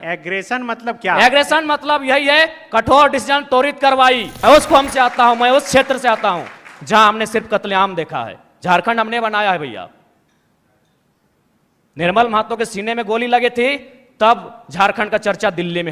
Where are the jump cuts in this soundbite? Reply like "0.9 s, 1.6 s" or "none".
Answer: 4.3 s